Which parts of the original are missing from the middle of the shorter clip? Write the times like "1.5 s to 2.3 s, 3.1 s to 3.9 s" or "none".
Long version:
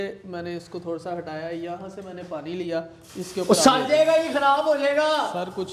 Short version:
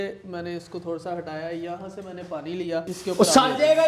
2.9 s to 3.2 s